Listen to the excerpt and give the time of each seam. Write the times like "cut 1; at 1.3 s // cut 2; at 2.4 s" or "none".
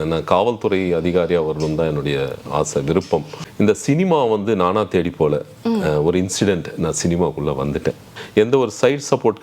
cut 1; at 3.4 s // cut 2; at 8.1 s